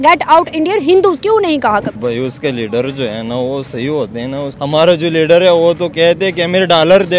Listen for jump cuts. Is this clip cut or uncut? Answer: cut